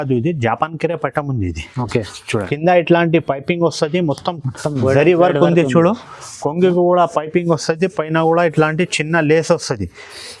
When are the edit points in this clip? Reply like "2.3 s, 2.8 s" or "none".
2.2 s